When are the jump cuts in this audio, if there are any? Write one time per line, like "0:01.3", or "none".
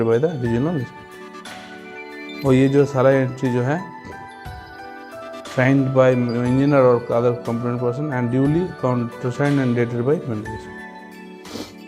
0:03.8
0:05.5
0:10.5